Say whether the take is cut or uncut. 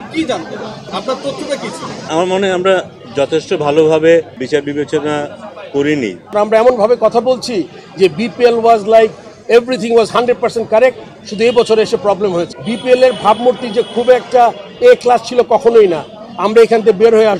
cut